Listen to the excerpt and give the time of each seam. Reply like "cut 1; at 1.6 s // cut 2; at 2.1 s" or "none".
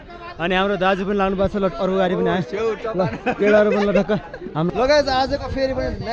cut 1; at 4.7 s

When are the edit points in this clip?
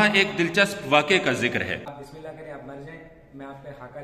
cut 1; at 1.9 s

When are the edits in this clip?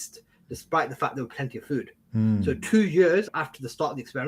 cut 1; at 3.3 s

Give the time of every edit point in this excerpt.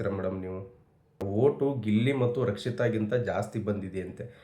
cut 1; at 1.3 s

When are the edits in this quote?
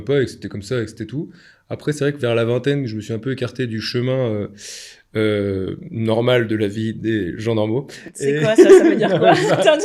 none

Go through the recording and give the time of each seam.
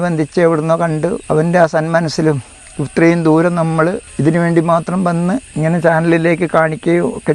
cut 1; at 1.2 s // cut 2; at 4.1 s // cut 3; at 5.5 s

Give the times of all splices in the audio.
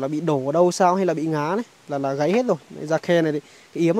none

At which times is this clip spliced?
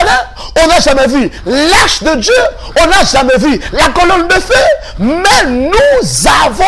none

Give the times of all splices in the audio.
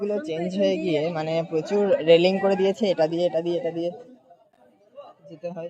none

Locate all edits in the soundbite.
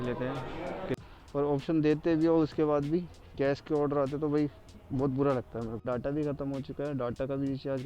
cut 1; at 1.0 s // cut 2; at 5.9 s

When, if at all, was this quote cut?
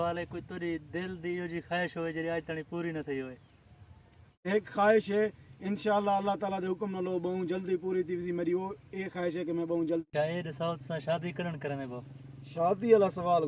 cut 1; at 4.4 s // cut 2; at 10.0 s

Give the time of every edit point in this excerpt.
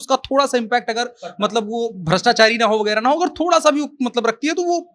none

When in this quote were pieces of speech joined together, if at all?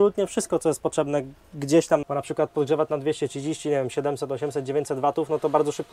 cut 1; at 2.0 s

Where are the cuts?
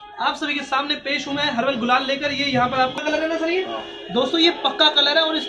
cut 1; at 3.0 s

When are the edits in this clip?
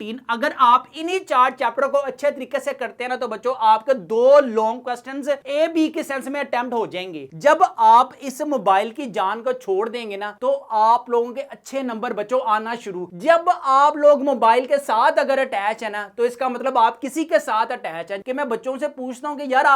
cut 1; at 7.2 s // cut 2; at 18.2 s

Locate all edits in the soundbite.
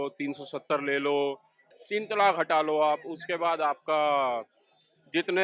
none

